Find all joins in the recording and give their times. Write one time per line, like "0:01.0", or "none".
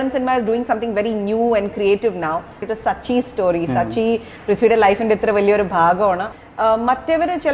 0:02.6
0:06.3